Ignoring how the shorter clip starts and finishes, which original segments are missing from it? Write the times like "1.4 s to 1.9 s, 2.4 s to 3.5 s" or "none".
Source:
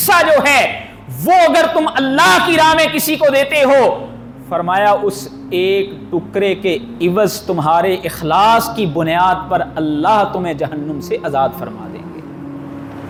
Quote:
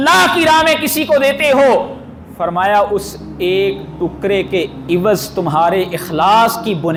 none